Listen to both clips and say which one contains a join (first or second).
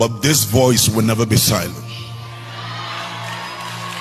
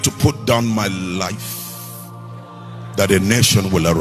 second